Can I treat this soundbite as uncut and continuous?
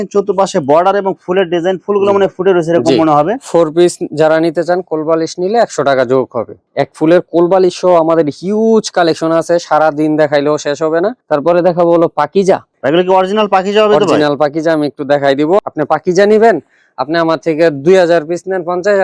yes; 0 cuts

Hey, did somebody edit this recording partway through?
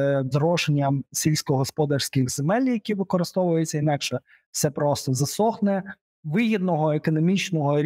no; 0 cuts

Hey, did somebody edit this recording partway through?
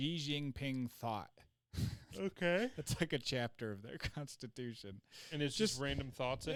no; 0 cuts

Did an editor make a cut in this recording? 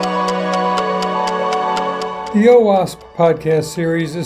yes; 1 cut; at 2.2 s

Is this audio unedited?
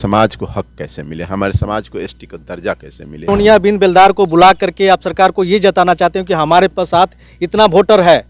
no; 1 cut; at 3.3 s

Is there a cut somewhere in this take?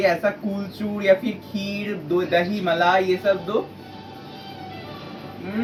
no; 0 cuts

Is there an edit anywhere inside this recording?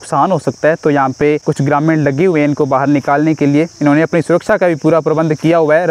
no; 0 cuts

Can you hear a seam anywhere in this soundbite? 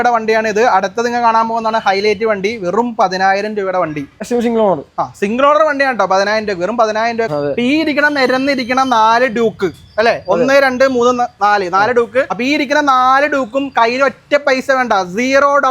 yes; 3 cuts; at 4.1 s, 7.3 s, 12.4 s

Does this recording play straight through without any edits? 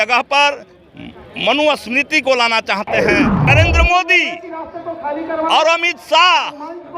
no; 1 cut; at 3.4 s

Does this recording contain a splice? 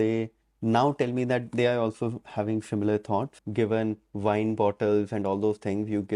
yes; 1 cut; at 3.3 s

